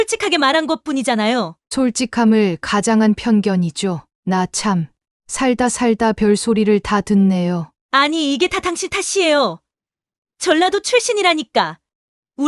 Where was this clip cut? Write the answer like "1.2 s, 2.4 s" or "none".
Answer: 7.7 s